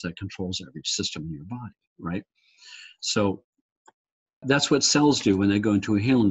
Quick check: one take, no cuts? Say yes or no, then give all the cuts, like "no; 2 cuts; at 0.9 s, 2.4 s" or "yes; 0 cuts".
no; 1 cut; at 4.4 s